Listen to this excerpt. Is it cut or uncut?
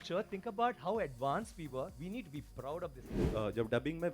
cut